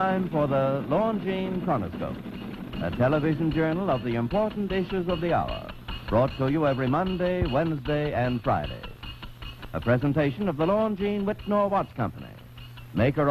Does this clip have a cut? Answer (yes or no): yes